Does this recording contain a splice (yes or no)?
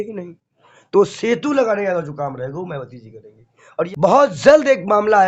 yes